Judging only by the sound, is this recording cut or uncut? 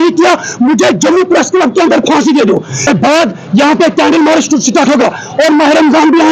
cut